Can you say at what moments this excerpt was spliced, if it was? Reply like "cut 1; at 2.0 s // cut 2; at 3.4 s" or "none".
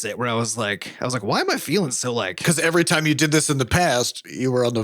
cut 1; at 2.4 s